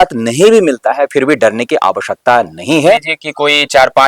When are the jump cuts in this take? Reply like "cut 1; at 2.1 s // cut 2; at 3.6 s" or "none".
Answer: cut 1; at 3.1 s